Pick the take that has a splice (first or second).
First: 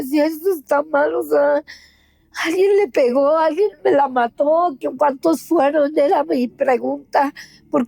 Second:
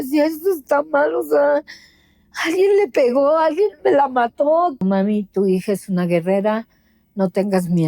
second